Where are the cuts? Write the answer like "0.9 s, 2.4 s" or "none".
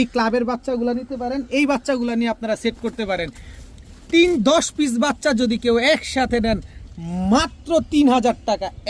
none